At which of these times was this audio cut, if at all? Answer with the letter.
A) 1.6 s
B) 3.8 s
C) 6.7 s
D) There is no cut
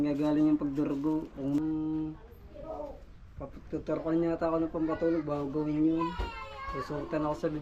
A